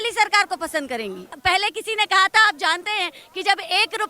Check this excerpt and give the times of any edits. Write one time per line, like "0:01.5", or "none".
0:01.4